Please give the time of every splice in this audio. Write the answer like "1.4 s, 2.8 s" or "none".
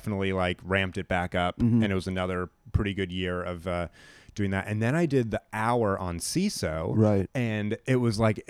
none